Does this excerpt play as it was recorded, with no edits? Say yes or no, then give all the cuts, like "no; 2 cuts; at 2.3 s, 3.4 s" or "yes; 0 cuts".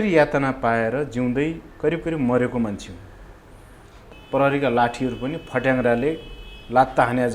no; 1 cut; at 4.0 s